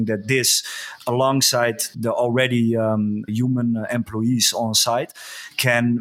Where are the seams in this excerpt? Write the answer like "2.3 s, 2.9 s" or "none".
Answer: 1.9 s, 3.3 s